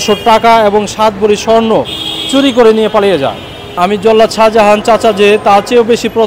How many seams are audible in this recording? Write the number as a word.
one